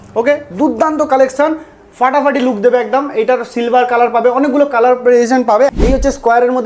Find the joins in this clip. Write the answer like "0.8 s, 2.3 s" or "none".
5.7 s